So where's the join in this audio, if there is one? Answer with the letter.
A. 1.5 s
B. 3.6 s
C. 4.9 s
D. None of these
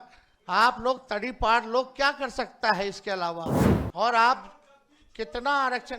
B